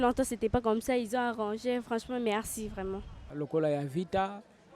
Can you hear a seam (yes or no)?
yes